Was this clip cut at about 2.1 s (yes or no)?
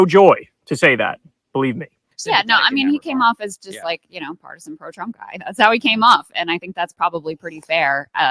yes